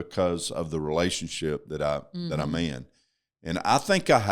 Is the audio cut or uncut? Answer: uncut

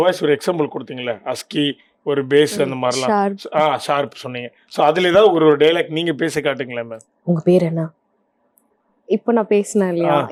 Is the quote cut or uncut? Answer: uncut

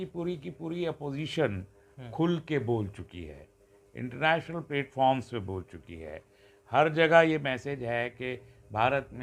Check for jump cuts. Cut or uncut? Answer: uncut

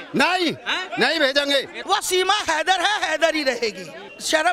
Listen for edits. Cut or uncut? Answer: cut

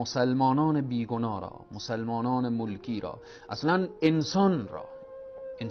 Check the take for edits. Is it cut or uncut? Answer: uncut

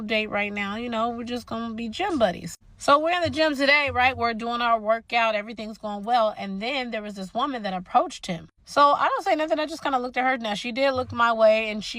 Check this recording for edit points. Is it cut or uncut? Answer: cut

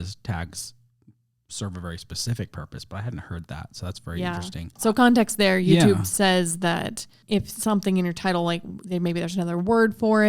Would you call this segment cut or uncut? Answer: cut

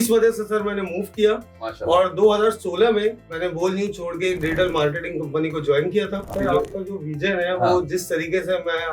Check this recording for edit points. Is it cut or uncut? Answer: cut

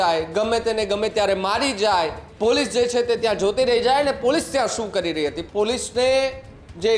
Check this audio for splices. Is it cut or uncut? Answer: cut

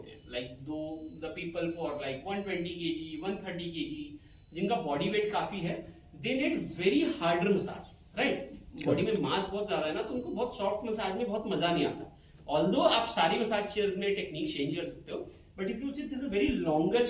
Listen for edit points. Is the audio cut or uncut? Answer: uncut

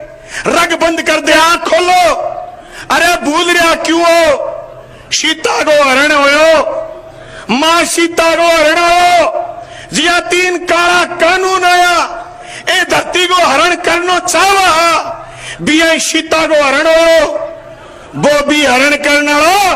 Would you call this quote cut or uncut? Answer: cut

